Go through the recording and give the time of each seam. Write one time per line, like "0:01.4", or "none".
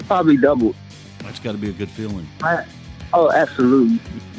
none